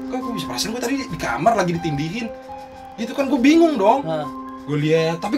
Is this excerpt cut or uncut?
uncut